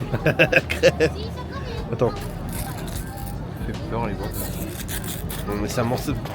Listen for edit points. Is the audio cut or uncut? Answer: uncut